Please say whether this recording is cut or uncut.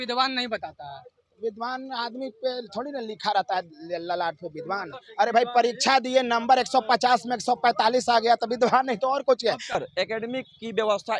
cut